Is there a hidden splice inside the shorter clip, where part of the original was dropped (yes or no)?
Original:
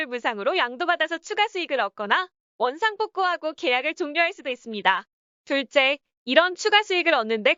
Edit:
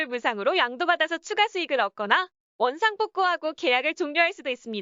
no